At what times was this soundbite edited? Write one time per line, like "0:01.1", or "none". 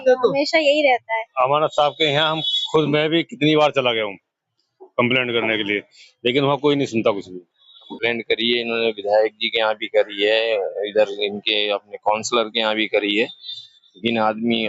0:01.3
0:07.8